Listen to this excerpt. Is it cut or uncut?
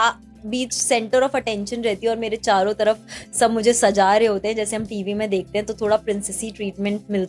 uncut